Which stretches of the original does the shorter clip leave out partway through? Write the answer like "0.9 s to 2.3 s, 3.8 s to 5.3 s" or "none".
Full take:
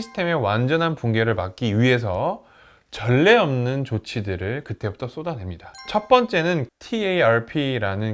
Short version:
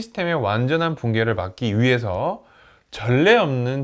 none